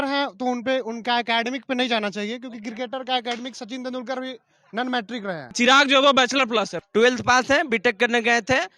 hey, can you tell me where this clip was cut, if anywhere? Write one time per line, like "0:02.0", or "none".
0:05.5
0:06.8